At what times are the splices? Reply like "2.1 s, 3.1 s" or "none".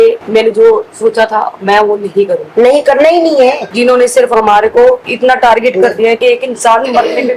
3.6 s, 6.2 s